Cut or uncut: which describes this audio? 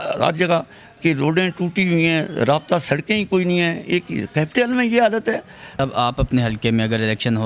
cut